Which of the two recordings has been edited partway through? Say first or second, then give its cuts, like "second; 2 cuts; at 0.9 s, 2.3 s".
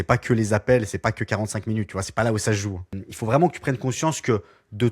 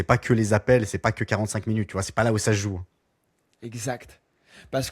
first; 1 cut; at 3.0 s